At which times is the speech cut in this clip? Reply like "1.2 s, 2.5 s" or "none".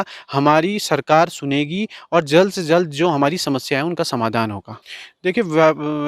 4.7 s

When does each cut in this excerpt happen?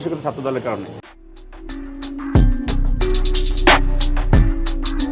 none

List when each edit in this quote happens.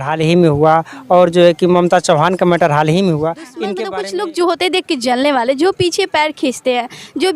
3.8 s

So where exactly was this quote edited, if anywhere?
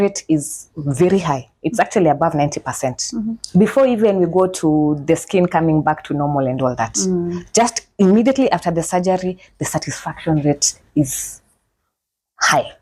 none

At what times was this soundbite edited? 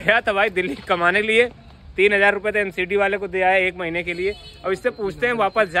none

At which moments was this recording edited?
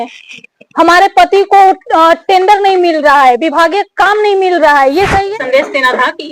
5.2 s

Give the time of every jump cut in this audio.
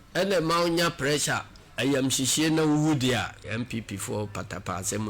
3.5 s

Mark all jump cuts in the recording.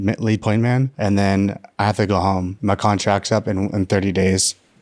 0.9 s, 2.5 s

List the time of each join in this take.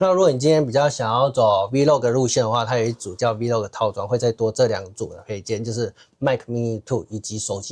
none

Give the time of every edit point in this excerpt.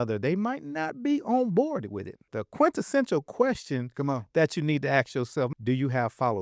2.4 s, 5.5 s

